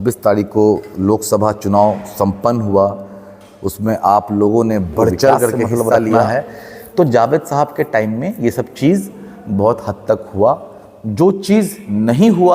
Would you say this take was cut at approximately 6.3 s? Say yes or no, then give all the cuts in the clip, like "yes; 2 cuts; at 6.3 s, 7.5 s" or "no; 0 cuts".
yes; 1 cut; at 6.3 s